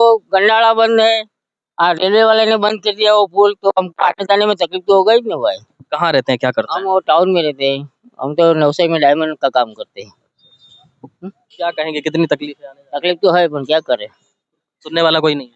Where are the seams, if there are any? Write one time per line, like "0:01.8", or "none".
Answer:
none